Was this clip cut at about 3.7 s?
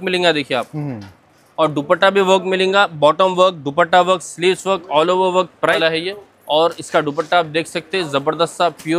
no; 1 cut; at 5.8 s

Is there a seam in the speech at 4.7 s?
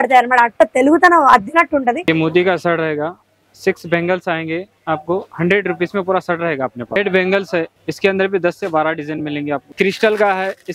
no; 4 cuts; at 2.1 s, 7.0 s, 7.7 s, 9.7 s

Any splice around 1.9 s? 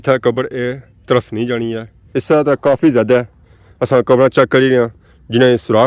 yes; 1 cut; at 1.9 s

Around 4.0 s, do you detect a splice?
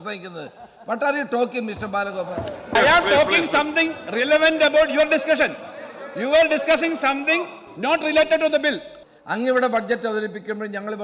no; 2 cuts; at 2.7 s, 8.9 s

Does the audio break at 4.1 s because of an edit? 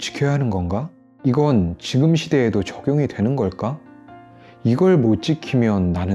no; 1 cut; at 1.0 s

